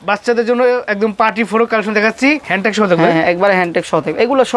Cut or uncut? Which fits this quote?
cut